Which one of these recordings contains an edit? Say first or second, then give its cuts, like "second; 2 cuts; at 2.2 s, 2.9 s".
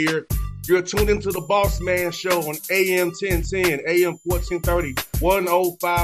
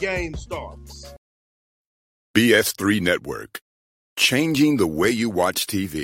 second; 1 cut; at 1.1 s